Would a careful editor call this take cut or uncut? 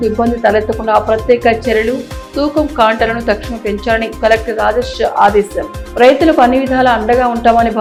uncut